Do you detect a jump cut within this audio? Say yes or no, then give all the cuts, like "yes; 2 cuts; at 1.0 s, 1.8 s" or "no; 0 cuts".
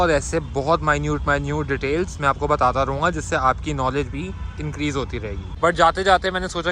yes; 1 cut; at 5.4 s